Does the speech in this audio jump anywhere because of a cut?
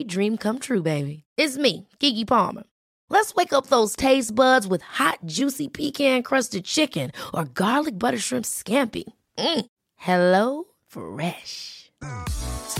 no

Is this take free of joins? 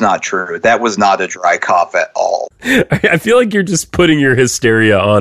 no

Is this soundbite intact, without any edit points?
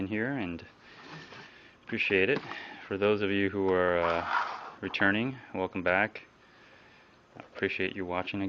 yes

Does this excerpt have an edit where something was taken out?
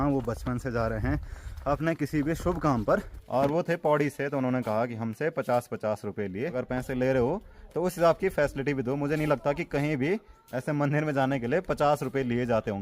yes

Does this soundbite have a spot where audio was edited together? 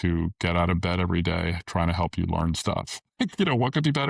no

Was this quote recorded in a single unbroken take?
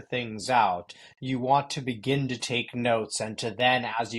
yes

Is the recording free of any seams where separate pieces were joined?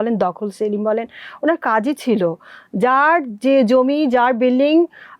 yes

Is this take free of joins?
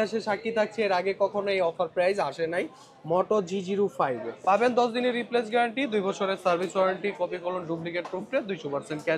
no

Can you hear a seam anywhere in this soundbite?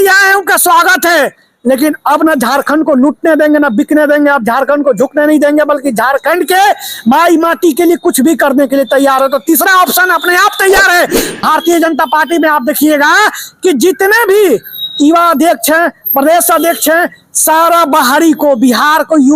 yes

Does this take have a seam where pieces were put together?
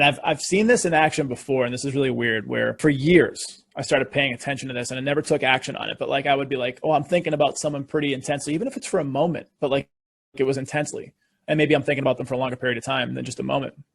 yes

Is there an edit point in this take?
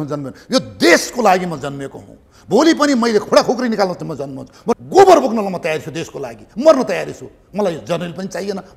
yes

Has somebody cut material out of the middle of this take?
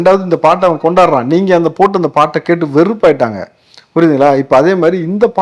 no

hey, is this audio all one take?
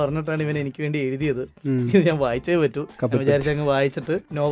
yes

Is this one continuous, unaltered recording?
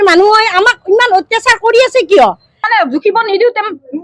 no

